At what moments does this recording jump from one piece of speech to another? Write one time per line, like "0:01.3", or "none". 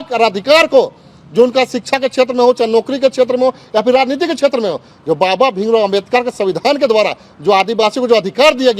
none